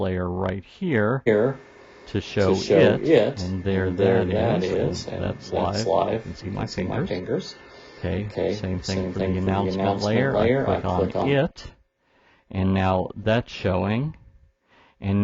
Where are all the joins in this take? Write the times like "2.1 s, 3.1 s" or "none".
none